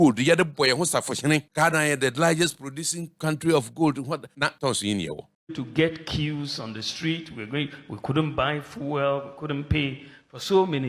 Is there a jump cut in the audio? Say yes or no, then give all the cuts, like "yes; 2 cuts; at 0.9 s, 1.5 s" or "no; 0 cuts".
yes; 4 cuts; at 1.5 s, 3.1 s, 4.4 s, 5.4 s